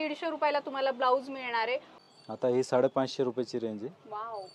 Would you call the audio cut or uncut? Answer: cut